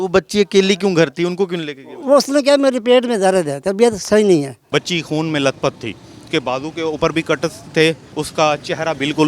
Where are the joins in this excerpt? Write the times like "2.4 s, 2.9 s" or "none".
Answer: 4.7 s, 6.2 s, 8.1 s